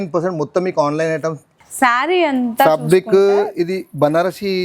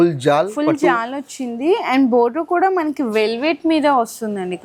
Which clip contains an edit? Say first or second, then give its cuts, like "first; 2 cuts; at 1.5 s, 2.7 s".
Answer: first; 1 cut; at 1.5 s